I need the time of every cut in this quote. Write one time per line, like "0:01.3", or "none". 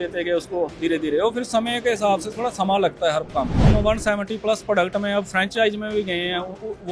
0:03.7